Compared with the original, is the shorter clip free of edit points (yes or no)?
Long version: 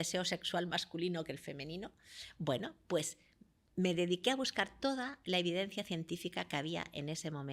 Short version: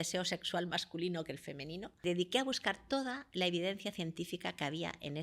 no